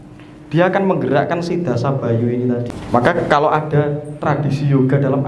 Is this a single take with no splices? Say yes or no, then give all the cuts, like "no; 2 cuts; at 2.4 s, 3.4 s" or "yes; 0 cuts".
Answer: no; 1 cut; at 2.7 s